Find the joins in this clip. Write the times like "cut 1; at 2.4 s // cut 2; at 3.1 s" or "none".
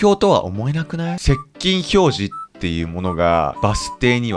cut 1; at 1.2 s // cut 2; at 3.5 s